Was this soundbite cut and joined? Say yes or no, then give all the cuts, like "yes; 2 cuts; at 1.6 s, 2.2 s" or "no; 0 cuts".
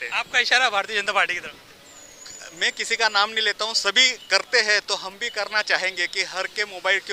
no; 0 cuts